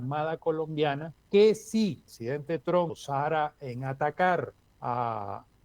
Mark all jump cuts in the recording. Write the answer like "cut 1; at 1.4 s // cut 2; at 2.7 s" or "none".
cut 1; at 1.1 s // cut 2; at 2.1 s // cut 3; at 3.0 s // cut 4; at 4.6 s